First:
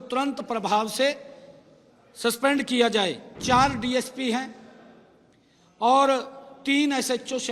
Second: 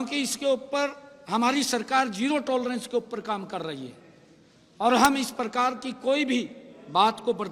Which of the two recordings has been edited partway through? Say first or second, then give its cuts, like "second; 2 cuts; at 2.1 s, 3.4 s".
first; 1 cut; at 3.3 s